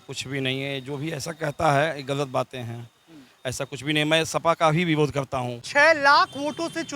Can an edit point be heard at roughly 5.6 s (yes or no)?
yes